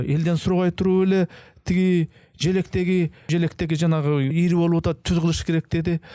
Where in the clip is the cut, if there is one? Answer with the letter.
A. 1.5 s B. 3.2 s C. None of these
B